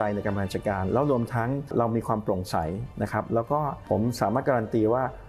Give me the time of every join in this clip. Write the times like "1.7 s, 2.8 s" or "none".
1.7 s, 3.8 s